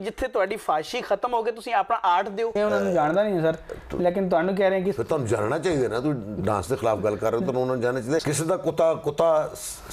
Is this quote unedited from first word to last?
no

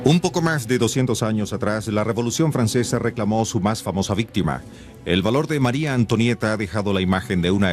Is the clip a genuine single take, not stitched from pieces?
no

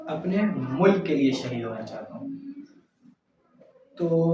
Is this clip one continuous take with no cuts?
yes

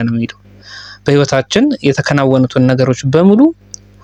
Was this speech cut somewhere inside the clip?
no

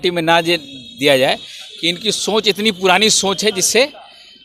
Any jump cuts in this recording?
no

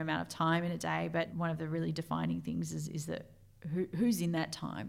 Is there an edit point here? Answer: yes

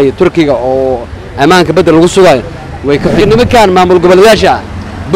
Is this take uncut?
no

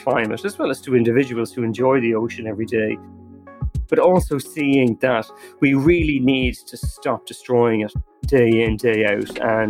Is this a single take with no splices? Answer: no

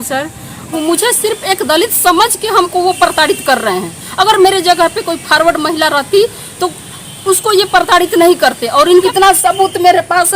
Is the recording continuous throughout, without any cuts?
no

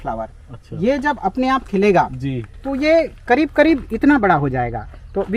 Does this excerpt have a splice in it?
no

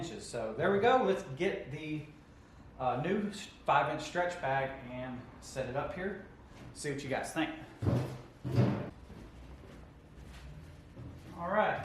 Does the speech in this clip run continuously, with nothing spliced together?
no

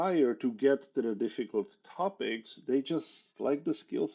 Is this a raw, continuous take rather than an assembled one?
yes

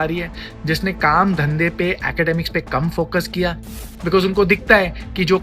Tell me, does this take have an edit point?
yes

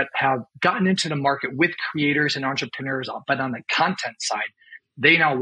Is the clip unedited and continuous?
yes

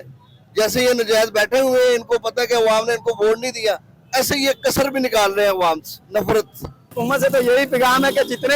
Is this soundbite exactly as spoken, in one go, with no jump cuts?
no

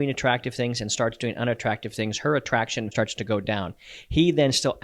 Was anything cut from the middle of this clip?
yes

